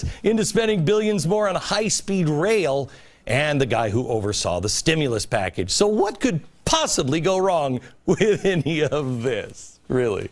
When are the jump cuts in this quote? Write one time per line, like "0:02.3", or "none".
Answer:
0:06.8